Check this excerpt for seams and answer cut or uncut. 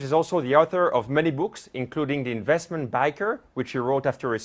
cut